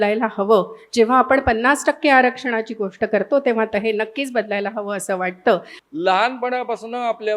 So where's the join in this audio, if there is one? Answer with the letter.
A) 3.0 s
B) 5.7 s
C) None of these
B